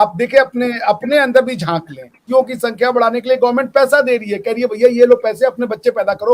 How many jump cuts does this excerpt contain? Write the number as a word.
one